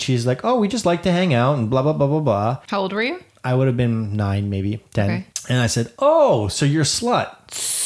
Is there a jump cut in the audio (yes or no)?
yes